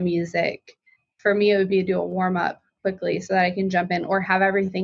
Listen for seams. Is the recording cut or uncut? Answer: cut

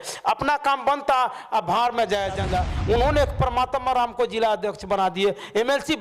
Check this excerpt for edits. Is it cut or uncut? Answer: cut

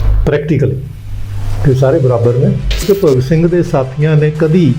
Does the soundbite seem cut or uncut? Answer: cut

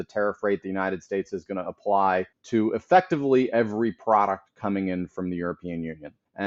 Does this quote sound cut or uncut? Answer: uncut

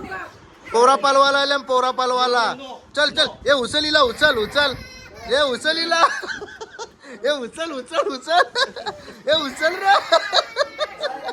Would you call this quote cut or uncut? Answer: uncut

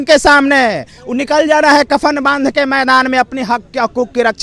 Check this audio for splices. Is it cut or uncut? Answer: uncut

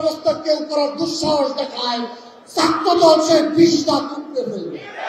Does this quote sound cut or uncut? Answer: uncut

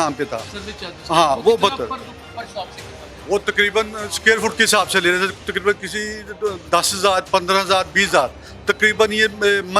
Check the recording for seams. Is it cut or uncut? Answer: uncut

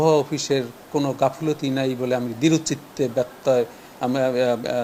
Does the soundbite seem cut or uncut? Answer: uncut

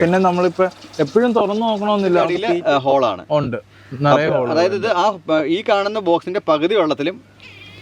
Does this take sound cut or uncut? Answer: cut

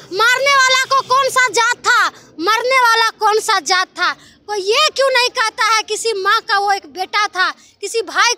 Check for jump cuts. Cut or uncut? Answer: uncut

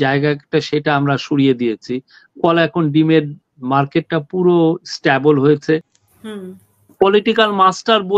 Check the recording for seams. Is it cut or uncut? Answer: cut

